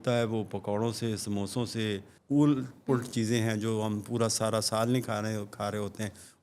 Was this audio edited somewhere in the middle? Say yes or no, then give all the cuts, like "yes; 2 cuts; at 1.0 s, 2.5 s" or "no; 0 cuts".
yes; 1 cut; at 2.1 s